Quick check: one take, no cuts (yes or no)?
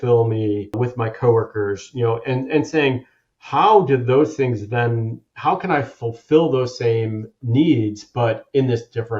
no